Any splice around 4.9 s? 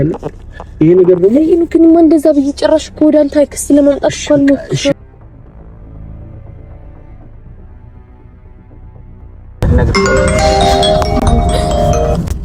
yes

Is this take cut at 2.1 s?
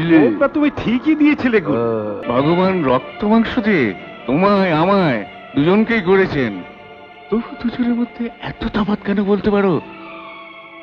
yes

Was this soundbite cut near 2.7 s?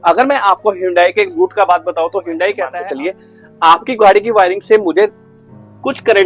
yes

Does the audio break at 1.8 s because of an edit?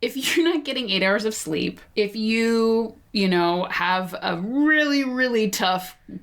yes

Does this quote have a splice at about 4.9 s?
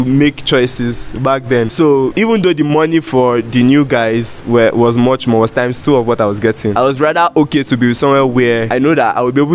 no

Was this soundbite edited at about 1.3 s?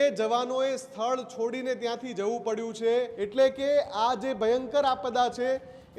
no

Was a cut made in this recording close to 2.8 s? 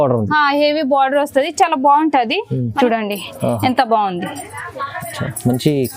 yes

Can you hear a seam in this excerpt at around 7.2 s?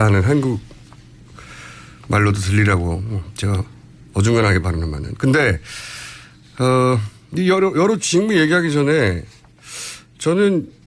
yes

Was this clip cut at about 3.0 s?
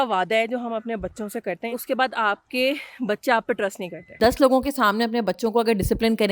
no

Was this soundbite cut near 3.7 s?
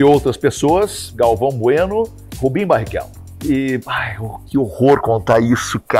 no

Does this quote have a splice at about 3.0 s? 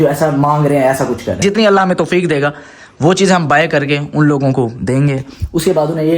no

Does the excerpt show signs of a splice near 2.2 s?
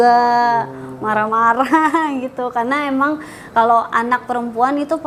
no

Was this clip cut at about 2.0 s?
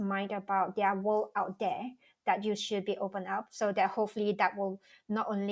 no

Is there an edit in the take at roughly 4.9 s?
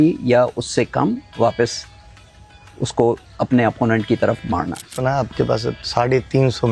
yes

